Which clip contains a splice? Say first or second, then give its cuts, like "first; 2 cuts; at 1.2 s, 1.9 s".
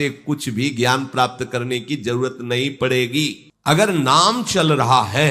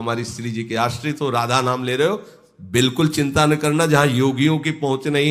first; 1 cut; at 3.5 s